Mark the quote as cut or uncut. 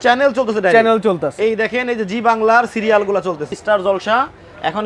cut